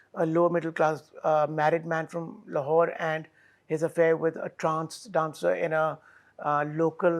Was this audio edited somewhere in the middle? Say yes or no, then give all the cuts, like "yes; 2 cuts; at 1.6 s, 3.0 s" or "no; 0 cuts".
no; 0 cuts